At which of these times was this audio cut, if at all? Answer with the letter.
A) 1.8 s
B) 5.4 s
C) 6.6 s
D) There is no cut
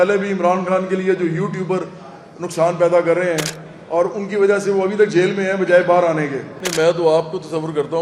C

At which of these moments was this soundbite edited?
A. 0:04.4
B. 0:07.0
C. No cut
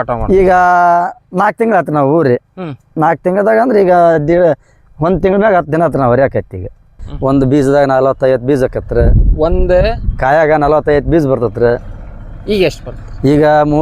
B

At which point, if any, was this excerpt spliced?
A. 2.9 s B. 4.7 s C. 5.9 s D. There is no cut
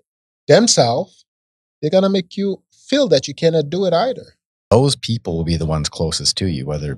B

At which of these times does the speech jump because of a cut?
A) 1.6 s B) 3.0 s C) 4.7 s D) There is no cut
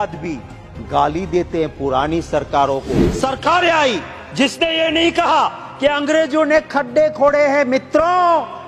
B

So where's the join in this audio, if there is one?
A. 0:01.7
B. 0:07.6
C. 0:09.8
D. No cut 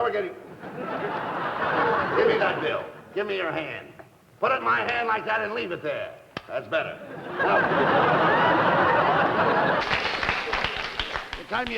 C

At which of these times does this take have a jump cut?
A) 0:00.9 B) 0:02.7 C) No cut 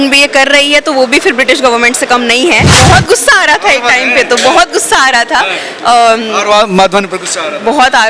B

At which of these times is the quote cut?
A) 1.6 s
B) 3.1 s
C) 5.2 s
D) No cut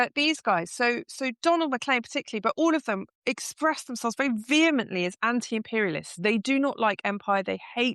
B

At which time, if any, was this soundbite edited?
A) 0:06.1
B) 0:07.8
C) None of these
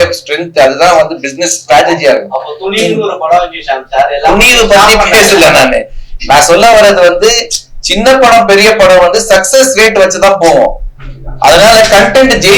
C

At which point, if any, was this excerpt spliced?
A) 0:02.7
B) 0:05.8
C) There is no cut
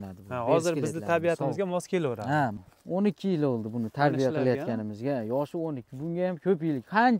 A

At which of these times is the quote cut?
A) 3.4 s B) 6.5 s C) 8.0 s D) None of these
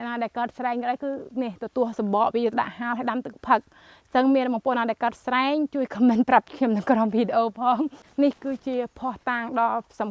C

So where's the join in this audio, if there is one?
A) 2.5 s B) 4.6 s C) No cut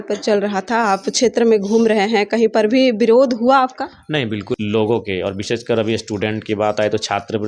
B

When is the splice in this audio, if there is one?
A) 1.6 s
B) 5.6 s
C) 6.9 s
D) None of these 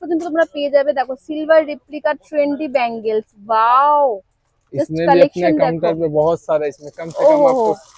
D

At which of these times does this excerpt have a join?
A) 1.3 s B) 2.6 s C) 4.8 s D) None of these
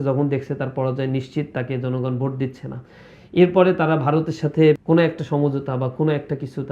C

